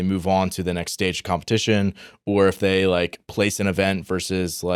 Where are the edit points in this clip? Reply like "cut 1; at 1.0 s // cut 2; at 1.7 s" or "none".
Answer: none